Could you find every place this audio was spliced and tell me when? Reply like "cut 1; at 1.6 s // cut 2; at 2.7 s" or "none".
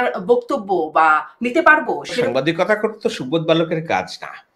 cut 1; at 2.3 s

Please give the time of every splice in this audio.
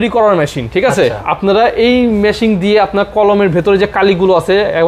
none

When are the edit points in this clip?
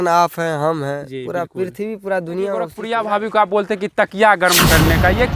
cut 1; at 2.8 s

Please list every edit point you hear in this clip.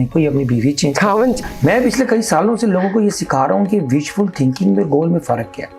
cut 1; at 1.4 s

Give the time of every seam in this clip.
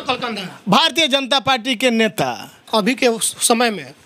cut 1; at 2.7 s

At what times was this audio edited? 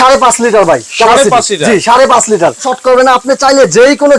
cut 1; at 2.7 s

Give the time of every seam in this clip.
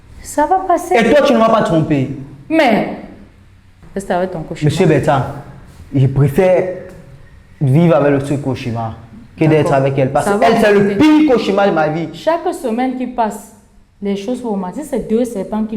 cut 1; at 3.8 s

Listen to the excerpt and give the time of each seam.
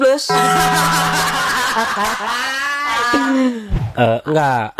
cut 1; at 3.7 s

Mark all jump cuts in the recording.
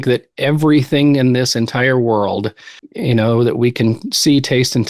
none

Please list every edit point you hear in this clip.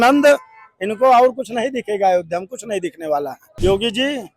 cut 1; at 3.4 s

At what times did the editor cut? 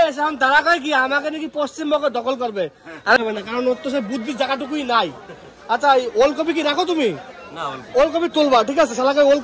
cut 1; at 3.2 s

